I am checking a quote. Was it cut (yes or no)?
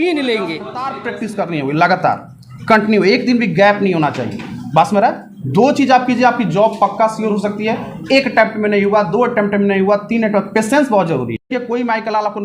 yes